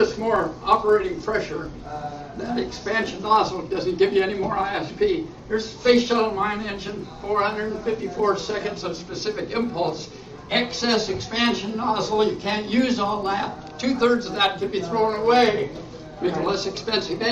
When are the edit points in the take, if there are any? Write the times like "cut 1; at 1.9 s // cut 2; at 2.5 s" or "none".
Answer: cut 1; at 8.2 s